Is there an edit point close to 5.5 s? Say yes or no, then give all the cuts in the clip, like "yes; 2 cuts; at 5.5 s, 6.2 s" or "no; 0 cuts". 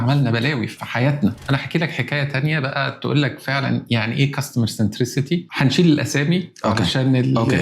yes; 2 cuts; at 1.1 s, 5.5 s